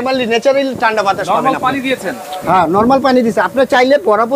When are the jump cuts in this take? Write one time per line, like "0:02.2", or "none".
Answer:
none

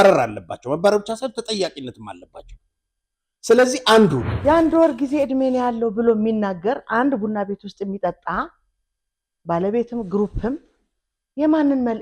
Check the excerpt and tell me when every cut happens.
0:04.3

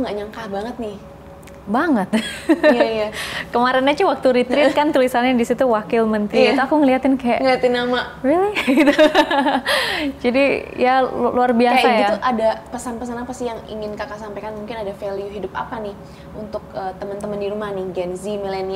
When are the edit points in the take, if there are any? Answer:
none

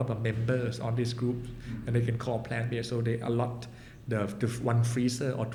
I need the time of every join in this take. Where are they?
none

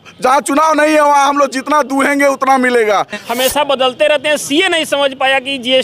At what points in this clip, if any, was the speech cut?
0:03.2

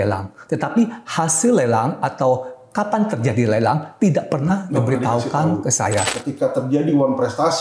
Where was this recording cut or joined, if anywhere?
0:06.2

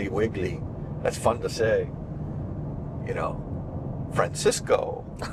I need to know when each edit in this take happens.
none

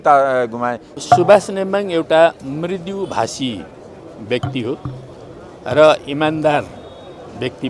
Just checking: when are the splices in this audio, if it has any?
0:01.0

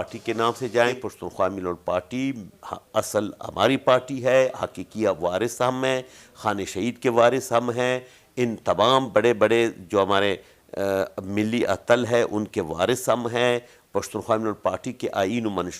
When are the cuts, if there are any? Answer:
0:01.0

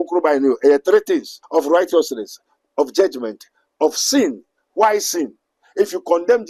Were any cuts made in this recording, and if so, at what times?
0:01.4

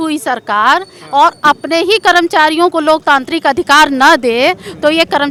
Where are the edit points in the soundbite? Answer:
none

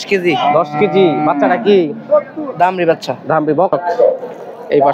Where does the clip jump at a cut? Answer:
0:03.7

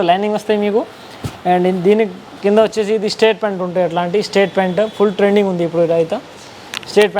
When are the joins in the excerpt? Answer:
none

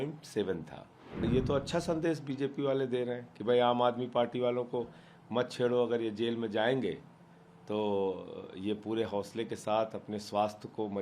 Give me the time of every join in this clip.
0:01.3

